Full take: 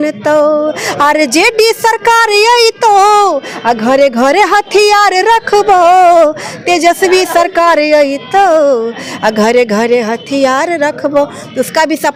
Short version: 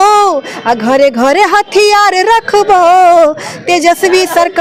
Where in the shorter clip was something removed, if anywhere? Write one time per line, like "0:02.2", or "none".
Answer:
none

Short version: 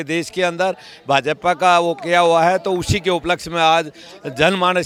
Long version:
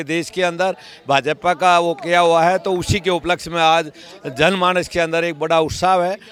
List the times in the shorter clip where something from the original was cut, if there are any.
none

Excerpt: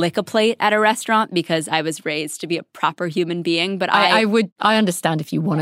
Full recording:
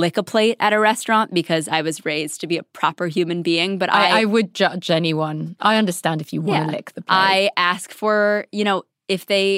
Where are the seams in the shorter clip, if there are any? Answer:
0:04.5

